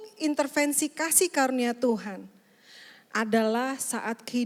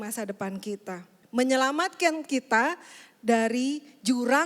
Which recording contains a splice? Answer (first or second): second